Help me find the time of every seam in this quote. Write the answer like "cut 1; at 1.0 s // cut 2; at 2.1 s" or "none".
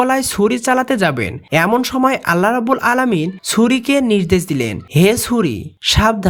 none